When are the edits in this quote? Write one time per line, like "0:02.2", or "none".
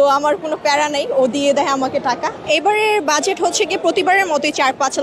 none